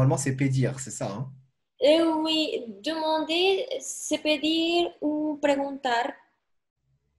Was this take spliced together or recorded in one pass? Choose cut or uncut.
uncut